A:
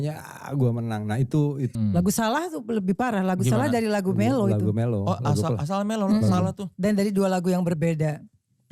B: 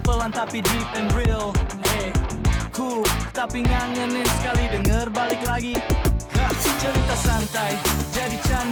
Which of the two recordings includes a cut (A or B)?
A